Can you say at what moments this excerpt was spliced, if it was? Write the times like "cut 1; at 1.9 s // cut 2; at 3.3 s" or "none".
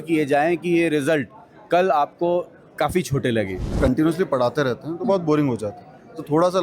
cut 1; at 3.7 s